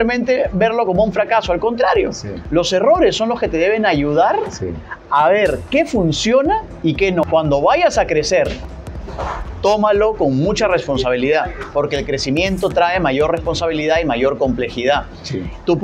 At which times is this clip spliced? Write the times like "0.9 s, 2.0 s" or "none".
7.2 s